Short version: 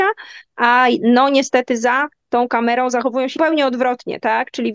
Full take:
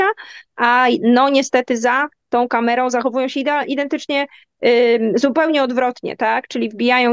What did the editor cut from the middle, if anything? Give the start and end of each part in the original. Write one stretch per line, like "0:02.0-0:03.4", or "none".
0:03.4-0:05.3